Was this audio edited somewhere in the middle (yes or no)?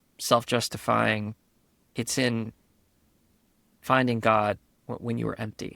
yes